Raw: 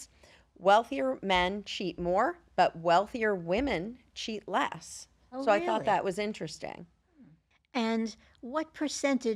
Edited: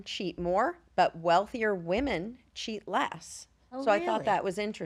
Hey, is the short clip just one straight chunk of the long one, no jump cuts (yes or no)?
yes